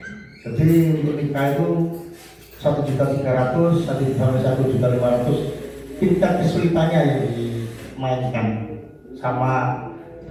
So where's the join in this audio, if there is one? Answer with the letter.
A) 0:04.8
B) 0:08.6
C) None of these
C